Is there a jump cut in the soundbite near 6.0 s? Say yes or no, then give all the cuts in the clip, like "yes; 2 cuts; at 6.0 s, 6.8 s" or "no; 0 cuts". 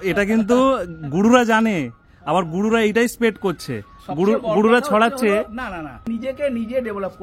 yes; 1 cut; at 6.0 s